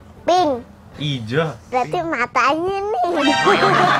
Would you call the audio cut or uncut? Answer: cut